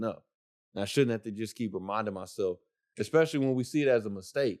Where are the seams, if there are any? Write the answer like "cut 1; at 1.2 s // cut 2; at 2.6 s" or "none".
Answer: none